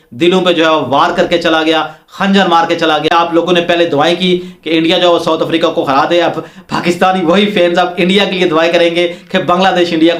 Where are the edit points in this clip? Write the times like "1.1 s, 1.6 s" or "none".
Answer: none